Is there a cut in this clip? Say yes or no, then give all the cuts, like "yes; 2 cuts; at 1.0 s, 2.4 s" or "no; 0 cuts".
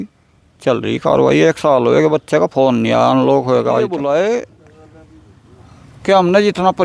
yes; 1 cut; at 3.8 s